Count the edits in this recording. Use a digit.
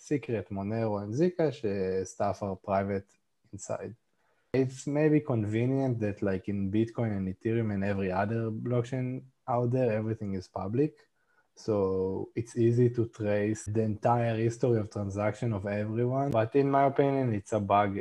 3